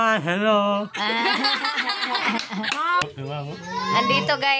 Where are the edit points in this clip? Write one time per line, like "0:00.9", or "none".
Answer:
0:03.0

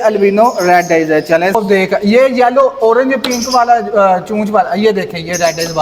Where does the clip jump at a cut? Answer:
0:01.6

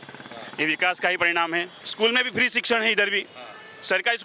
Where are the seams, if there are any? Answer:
0:01.8

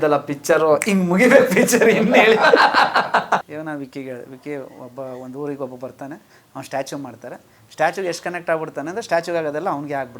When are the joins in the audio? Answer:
0:03.5

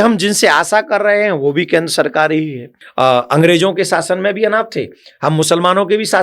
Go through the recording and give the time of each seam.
0:02.8

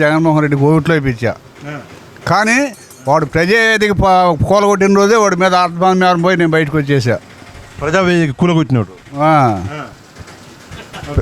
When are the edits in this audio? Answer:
none

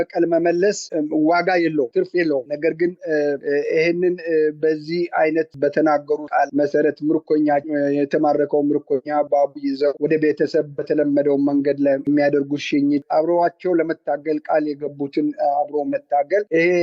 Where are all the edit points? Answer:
0:00.8
0:05.5
0:12.1
0:13.0

